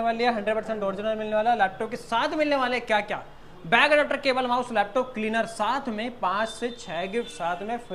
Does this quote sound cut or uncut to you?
uncut